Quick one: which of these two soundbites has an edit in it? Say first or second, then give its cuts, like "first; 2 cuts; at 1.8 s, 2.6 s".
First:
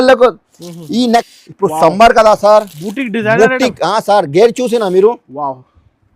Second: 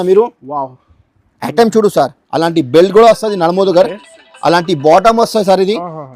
first; 1 cut; at 1.3 s